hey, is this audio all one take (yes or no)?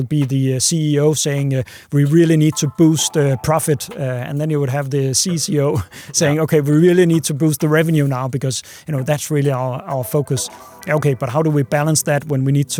yes